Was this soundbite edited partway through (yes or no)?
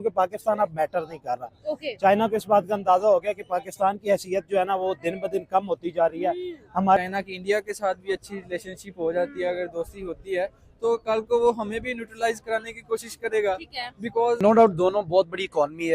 yes